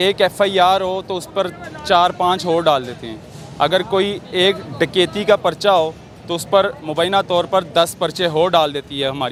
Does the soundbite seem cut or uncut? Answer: uncut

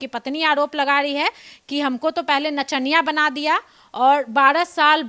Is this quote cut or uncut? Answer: uncut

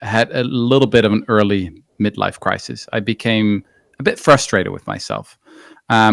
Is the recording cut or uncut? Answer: uncut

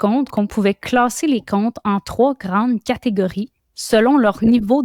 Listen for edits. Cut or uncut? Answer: uncut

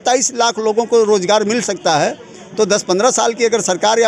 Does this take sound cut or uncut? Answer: uncut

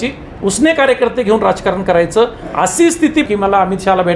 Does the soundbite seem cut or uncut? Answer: cut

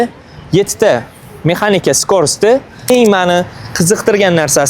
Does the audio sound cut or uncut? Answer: cut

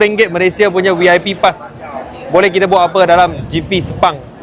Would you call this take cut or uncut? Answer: uncut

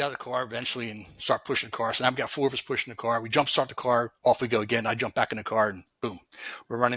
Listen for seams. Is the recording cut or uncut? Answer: uncut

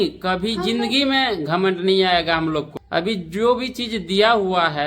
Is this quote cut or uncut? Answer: cut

